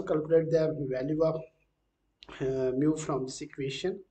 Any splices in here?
no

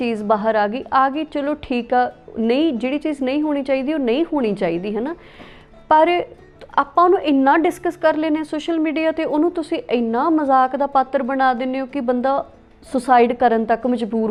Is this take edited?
no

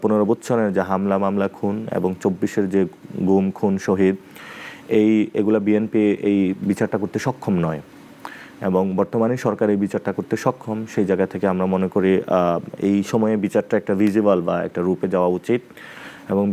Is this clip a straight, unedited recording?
yes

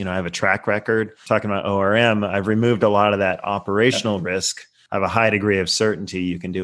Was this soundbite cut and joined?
yes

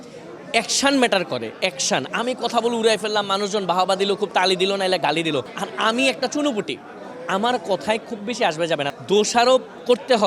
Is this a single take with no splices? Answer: no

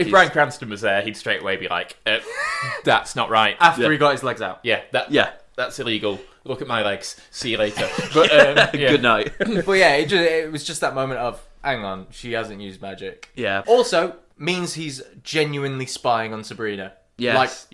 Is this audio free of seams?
no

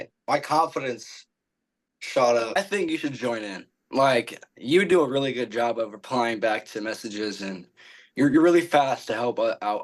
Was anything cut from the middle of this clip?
yes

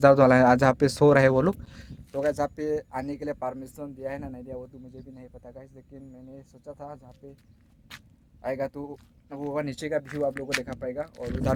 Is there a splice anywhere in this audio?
no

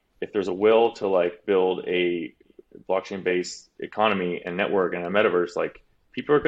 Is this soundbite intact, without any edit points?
no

